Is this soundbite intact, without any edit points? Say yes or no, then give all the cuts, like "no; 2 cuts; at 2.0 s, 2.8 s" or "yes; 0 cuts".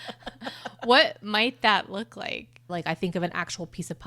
no; 1 cut; at 2.7 s